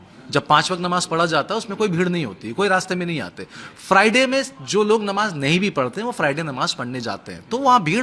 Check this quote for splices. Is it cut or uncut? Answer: uncut